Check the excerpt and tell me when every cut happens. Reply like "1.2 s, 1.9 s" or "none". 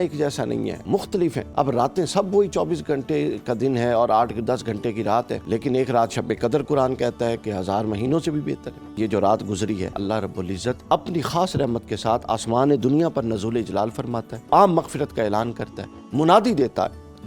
1.2 s, 5.4 s, 9.0 s, 10.4 s, 14.3 s